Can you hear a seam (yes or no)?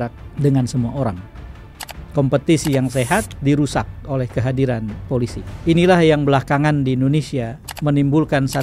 no